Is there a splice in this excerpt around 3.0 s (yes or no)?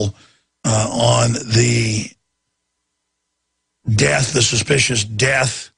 no